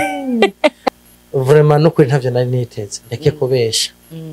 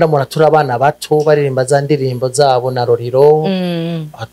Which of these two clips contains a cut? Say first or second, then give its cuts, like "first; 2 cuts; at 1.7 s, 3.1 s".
first; 1 cut; at 1.1 s